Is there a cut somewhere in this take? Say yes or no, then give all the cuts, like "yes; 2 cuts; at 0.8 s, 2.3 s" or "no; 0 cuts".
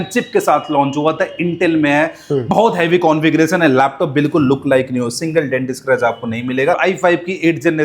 yes; 1 cut; at 6.8 s